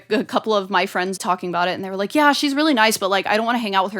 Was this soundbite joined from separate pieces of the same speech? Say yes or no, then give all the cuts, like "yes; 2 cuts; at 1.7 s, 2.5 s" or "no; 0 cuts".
yes; 1 cut; at 1.2 s